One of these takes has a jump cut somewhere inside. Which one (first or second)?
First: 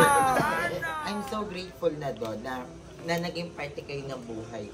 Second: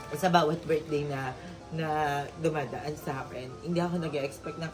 first